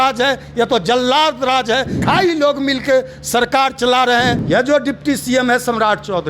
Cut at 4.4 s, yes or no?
yes